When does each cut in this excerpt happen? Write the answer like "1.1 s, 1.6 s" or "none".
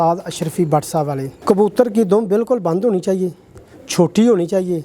1.4 s